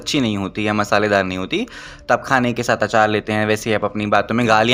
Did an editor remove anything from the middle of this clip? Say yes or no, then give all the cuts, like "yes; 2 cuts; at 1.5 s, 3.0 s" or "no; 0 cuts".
no; 0 cuts